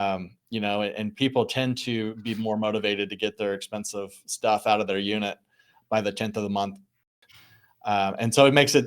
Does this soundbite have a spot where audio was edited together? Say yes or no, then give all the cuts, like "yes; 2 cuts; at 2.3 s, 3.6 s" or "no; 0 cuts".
yes; 1 cut; at 7.1 s